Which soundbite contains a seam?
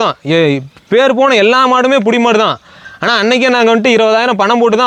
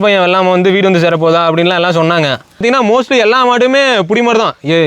second; 1 cut; at 2.6 s

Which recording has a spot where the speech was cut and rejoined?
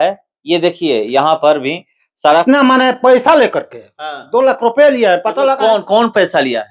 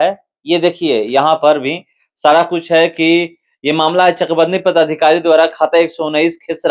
first; 1 cut; at 2.4 s

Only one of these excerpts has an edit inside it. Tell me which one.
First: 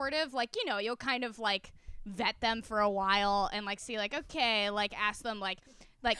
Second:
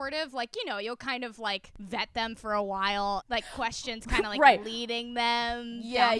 second; 2 cuts; at 1.7 s, 3.2 s

